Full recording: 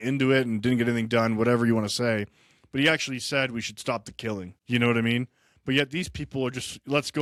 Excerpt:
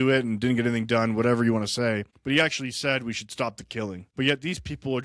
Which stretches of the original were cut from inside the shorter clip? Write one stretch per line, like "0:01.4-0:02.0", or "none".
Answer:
0:02.3-0:02.6
0:04.5-0:05.5